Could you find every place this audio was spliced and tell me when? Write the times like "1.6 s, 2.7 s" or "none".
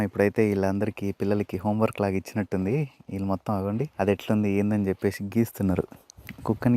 3.9 s

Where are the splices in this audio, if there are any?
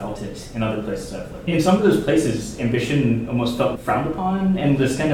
1.5 s

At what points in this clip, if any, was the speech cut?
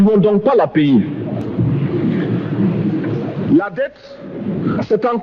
none

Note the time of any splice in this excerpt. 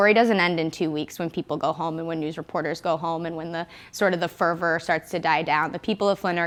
none

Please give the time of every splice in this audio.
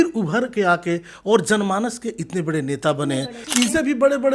3.4 s

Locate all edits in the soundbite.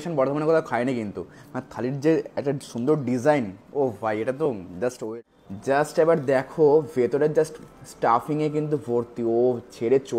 5.0 s

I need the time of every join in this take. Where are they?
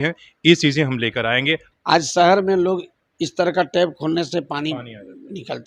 1.6 s

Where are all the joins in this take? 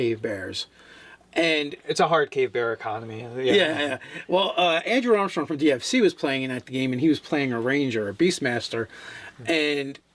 4.2 s

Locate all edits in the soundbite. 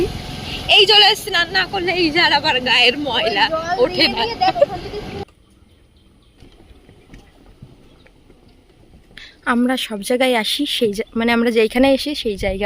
5.1 s

